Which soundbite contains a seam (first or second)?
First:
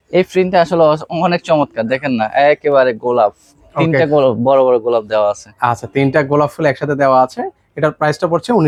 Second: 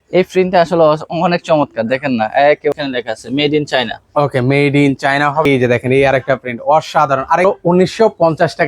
second